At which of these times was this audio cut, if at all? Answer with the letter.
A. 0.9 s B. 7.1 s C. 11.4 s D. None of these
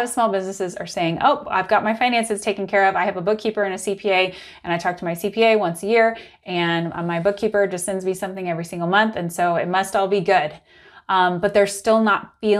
A